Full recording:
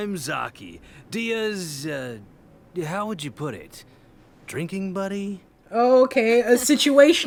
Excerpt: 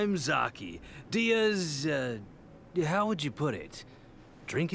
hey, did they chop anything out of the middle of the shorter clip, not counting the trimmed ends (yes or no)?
no